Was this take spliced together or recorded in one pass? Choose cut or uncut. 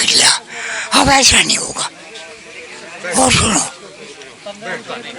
uncut